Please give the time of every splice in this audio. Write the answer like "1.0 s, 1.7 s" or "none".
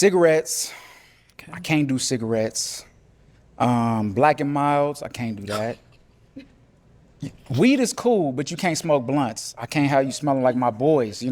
none